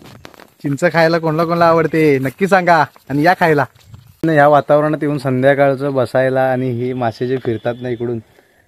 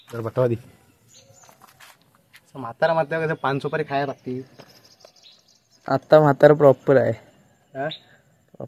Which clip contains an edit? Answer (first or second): first